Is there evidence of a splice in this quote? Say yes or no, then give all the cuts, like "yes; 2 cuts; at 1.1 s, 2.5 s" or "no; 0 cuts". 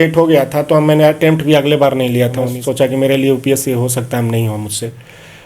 yes; 1 cut; at 2.5 s